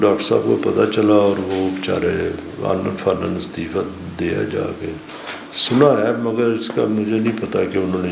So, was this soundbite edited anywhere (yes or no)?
no